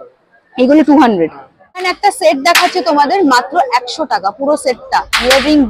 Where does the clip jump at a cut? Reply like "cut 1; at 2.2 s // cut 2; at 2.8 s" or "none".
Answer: cut 1; at 1.8 s

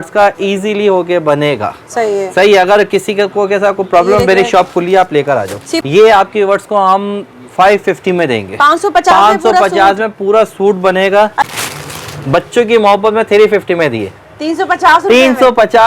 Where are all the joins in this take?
cut 1; at 5.7 s // cut 2; at 11.5 s

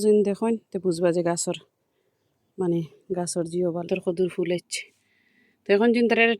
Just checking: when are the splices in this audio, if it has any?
cut 1; at 3.9 s

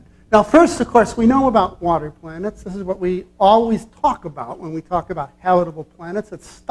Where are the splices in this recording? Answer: cut 1; at 5.7 s

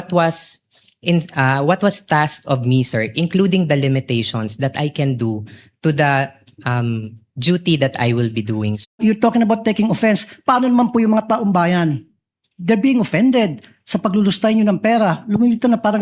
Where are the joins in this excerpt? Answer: cut 1; at 8.9 s

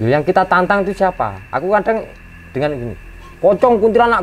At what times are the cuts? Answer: none

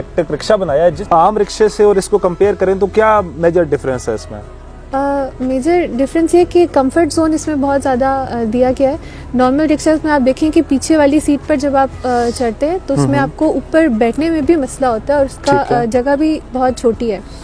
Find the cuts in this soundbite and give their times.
none

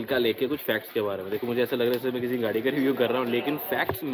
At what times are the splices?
none

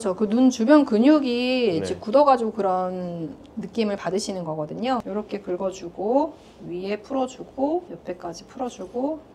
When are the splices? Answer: cut 1; at 5.1 s // cut 2; at 7.9 s

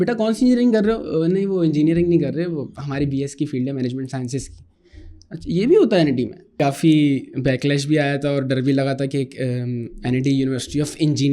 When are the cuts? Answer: cut 1; at 6.6 s

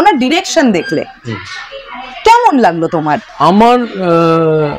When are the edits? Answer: cut 1; at 3.3 s

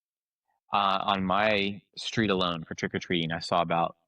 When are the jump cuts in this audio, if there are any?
none

